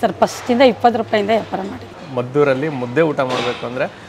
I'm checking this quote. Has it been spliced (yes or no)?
yes